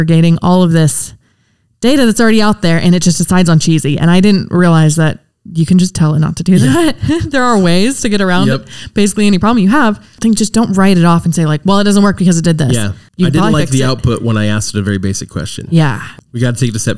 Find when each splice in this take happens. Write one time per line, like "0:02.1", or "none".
0:13.0
0:16.1